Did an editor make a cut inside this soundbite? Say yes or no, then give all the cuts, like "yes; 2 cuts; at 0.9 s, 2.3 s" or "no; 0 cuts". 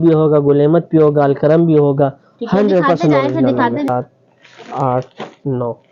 yes; 1 cut; at 3.9 s